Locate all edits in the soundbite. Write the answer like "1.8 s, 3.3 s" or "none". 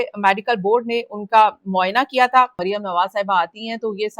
2.6 s